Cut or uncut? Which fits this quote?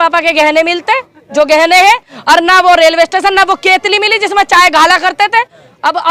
uncut